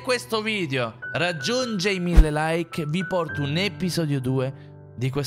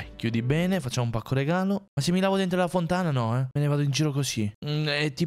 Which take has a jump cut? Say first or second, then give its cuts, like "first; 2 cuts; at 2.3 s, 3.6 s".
second; 2 cuts; at 1.9 s, 3.5 s